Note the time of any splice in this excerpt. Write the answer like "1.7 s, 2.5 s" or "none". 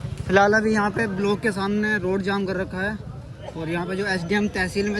none